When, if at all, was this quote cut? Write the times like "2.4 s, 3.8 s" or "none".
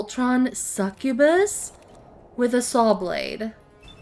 none